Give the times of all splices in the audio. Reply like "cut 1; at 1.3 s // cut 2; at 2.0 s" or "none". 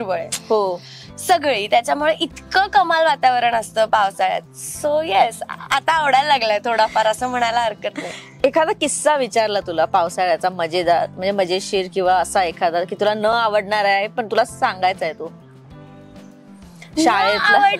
none